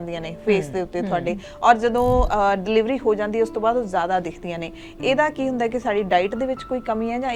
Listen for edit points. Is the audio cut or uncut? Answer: uncut